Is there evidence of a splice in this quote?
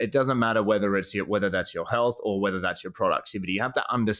no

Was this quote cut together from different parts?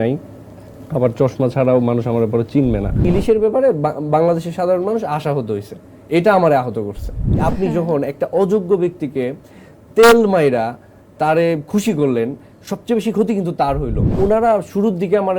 yes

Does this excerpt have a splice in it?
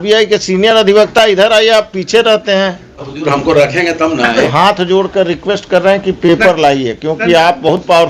yes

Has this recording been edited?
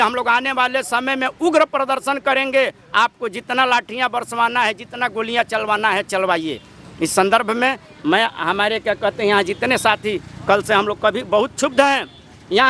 no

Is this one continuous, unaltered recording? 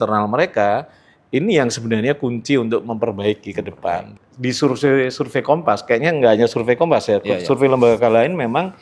no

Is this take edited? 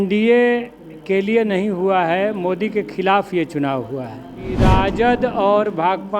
yes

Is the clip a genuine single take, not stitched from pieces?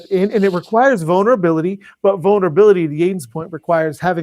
yes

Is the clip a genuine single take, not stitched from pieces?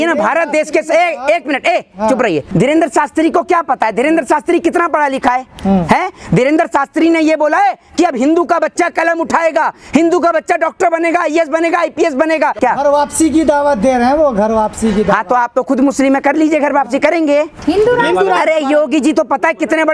no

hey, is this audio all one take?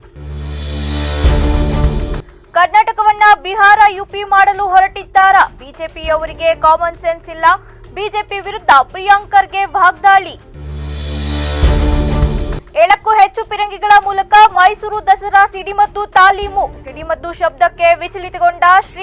yes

